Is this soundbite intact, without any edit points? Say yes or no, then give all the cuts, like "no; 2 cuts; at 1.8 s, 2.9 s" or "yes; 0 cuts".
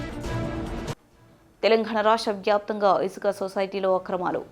no; 1 cut; at 0.9 s